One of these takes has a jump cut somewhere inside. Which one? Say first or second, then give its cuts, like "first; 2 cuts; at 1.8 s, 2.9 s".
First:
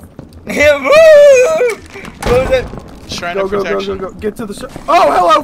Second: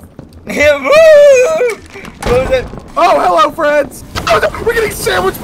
second; 2 cuts; at 2.8 s, 4.1 s